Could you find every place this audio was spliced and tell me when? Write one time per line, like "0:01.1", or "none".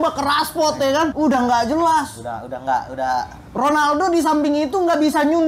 0:01.1